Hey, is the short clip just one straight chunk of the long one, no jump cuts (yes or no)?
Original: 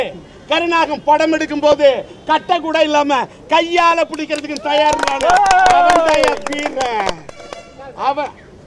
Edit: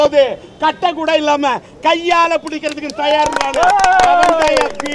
yes